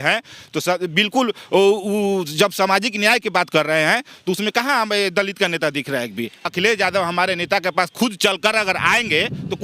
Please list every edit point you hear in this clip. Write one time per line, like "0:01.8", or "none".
0:06.5